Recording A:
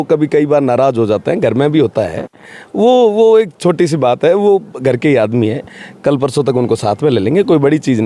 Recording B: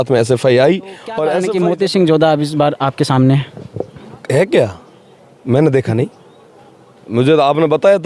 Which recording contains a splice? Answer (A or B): B